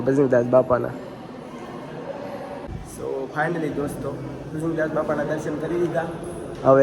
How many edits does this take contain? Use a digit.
1